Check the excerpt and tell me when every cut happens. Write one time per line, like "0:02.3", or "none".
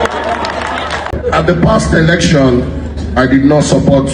0:01.1